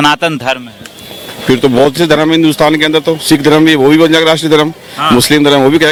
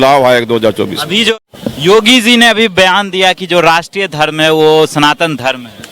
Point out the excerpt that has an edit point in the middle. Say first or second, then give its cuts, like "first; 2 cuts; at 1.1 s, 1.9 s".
second; 1 cut; at 1.3 s